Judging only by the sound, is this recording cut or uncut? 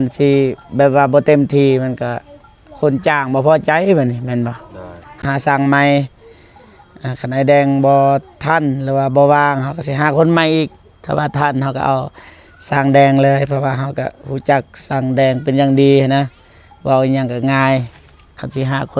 cut